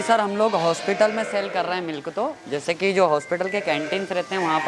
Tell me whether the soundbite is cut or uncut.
uncut